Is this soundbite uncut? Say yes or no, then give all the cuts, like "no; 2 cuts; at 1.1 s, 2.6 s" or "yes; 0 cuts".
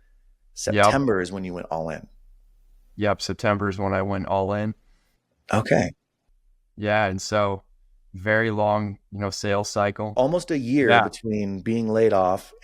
no; 1 cut; at 10.1 s